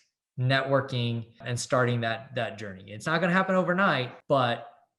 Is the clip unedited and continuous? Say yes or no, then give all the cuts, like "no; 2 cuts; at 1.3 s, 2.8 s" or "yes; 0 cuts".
no; 2 cuts; at 1.5 s, 4.1 s